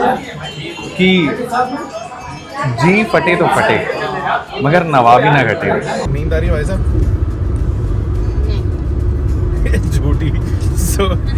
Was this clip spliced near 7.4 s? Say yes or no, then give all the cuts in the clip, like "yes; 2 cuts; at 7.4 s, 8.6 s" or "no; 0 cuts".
no; 1 cut; at 6.0 s